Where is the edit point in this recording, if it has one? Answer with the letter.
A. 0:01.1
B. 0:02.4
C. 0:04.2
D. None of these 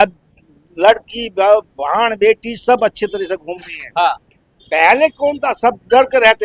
D